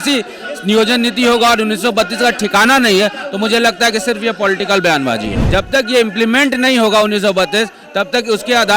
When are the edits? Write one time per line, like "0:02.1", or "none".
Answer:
0:05.4